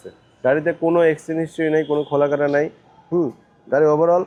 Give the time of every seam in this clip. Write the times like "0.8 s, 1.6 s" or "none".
none